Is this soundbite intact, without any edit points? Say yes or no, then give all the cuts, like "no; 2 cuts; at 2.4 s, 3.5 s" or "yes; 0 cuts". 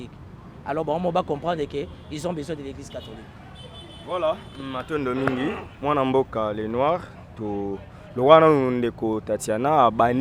yes; 0 cuts